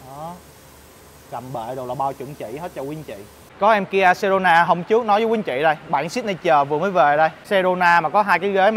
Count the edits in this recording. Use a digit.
2